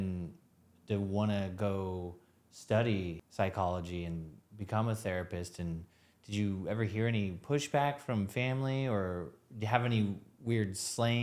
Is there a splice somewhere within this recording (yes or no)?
yes